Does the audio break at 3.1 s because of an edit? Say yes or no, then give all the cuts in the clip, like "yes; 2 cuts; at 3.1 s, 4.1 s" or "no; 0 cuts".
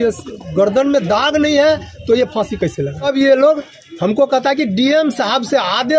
yes; 1 cut; at 3.1 s